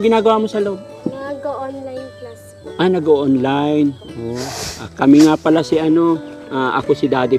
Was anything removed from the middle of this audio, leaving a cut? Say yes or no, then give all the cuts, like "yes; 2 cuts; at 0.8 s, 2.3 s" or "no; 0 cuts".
no; 0 cuts